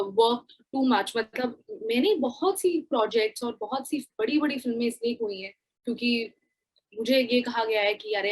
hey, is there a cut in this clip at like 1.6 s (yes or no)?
no